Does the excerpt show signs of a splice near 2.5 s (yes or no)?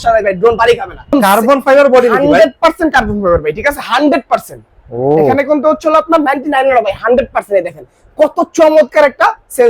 no